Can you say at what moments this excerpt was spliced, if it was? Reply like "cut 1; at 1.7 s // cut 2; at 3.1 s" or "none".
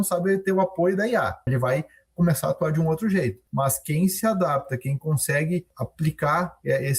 cut 1; at 1.5 s // cut 2; at 3.4 s // cut 3; at 5.7 s